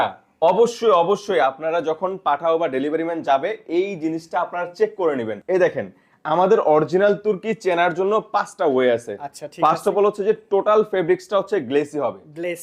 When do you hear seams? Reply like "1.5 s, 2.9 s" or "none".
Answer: 5.4 s

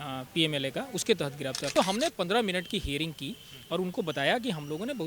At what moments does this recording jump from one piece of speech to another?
1.7 s

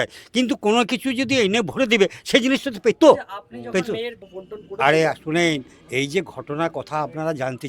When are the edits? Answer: 4.2 s

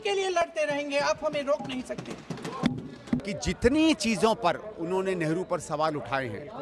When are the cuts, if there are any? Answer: 3.2 s

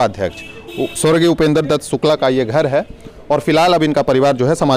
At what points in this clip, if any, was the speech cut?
none

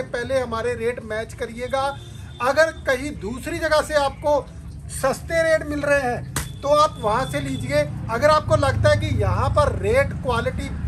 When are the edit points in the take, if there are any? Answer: none

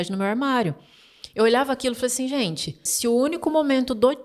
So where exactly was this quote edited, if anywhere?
2.9 s

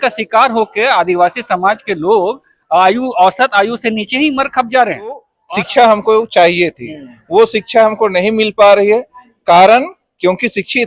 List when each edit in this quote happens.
5.3 s

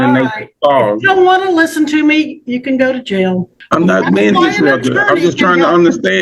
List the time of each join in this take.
3.6 s

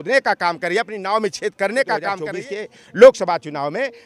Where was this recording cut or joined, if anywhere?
2.2 s

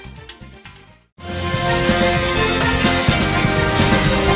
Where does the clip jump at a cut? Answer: 1.0 s

